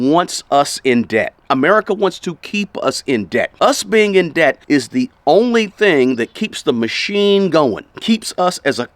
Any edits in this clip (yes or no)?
yes